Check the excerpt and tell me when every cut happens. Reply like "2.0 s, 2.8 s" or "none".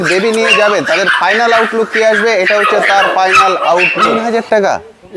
4.2 s